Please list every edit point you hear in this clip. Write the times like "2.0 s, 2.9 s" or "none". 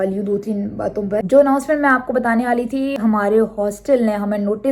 1.2 s, 3.0 s